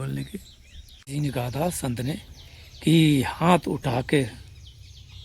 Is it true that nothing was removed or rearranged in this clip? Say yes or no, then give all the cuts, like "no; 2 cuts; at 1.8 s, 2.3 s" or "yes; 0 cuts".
no; 1 cut; at 0.9 s